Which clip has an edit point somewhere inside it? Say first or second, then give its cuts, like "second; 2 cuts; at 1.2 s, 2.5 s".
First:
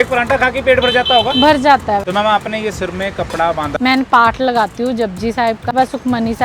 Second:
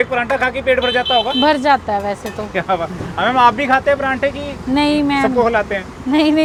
first; 3 cuts; at 2.0 s, 3.7 s, 5.7 s